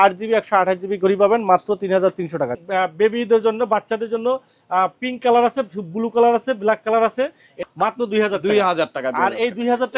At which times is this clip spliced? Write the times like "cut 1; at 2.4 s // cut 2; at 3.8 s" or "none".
cut 1; at 2.6 s // cut 2; at 7.6 s